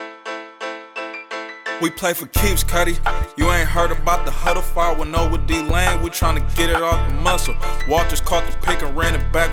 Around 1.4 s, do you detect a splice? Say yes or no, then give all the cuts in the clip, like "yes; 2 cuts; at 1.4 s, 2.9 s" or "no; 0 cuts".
no; 0 cuts